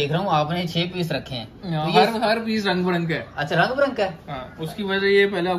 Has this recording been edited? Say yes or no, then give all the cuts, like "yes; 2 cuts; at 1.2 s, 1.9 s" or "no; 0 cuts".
no; 0 cuts